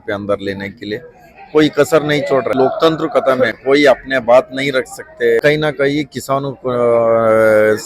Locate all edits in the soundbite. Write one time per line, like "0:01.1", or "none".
0:02.6
0:05.4